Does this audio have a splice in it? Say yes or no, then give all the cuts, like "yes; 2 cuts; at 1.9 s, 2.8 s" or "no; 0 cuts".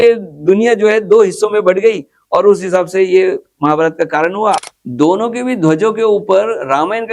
yes; 1 cut; at 4.6 s